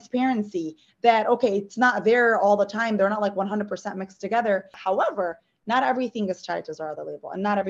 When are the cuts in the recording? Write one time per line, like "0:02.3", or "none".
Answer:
0:04.8